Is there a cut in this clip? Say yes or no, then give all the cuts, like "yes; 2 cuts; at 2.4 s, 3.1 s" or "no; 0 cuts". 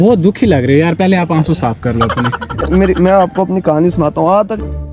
yes; 1 cut; at 2.6 s